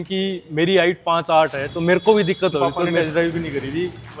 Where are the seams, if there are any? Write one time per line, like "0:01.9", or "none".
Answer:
0:02.8